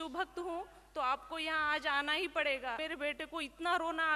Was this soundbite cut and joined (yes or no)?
yes